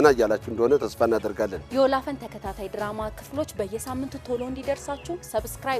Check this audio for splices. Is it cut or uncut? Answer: uncut